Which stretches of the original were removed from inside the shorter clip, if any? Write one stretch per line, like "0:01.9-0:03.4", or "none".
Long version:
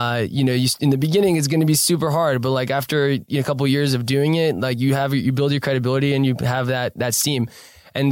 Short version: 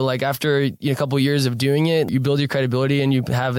0:04.6-0:05.2